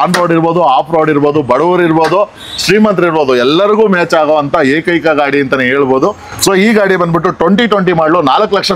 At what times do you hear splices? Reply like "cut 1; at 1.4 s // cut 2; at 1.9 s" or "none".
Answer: none